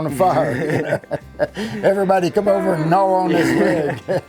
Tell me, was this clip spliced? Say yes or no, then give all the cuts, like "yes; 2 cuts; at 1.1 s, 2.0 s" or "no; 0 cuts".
no; 0 cuts